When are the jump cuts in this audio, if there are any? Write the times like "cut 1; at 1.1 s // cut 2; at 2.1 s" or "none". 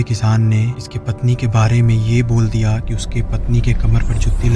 none